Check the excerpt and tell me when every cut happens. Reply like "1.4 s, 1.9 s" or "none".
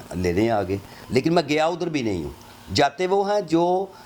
none